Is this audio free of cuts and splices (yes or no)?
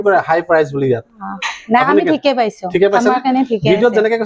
yes